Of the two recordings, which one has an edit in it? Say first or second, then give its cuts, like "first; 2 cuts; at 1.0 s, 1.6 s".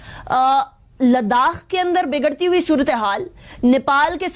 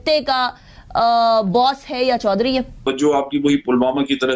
second; 1 cut; at 2.8 s